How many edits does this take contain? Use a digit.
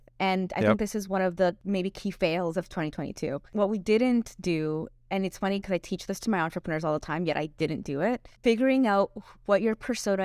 3